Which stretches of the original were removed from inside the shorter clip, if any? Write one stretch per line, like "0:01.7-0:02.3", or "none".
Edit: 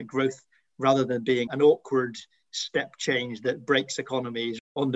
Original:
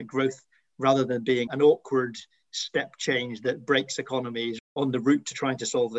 none